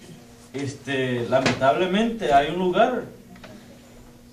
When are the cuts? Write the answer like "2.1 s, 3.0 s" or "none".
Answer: 3.0 s